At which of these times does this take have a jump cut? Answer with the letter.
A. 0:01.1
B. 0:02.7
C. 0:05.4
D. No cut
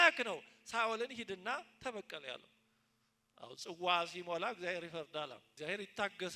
C